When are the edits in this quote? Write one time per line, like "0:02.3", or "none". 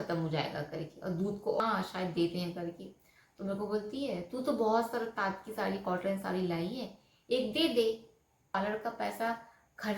0:01.6
0:08.5